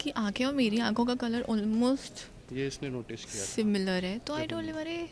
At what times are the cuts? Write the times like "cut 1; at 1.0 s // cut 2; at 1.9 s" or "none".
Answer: none